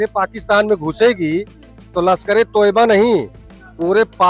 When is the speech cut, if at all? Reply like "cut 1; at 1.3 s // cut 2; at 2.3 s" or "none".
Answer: none